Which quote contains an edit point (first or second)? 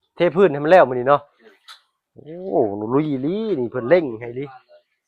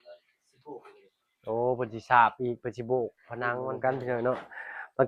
second